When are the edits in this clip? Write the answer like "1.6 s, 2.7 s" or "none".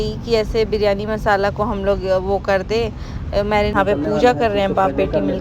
3.7 s